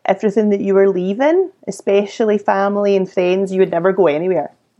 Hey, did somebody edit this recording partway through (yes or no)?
no